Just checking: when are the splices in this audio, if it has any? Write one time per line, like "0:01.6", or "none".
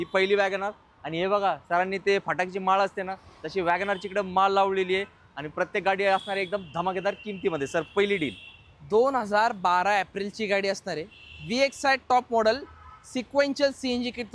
none